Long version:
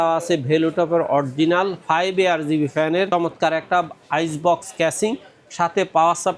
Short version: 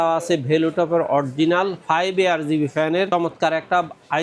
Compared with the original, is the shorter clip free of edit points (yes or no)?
yes